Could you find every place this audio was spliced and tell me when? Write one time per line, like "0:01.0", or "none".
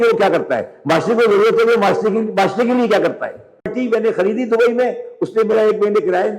0:03.7